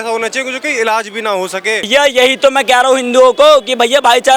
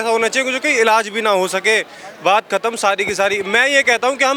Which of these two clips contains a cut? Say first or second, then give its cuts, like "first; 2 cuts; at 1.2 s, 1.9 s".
first; 1 cut; at 1.9 s